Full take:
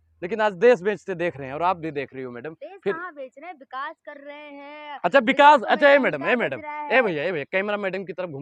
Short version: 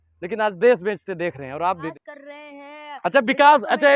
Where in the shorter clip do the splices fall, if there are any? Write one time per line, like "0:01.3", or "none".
0:01.9